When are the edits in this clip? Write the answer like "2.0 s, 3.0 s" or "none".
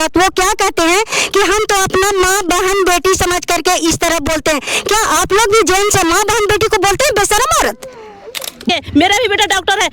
8.7 s